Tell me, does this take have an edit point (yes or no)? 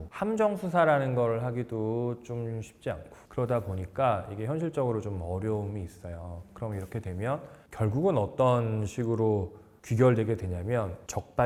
no